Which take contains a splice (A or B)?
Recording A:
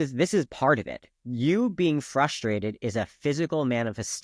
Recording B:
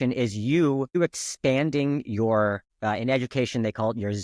B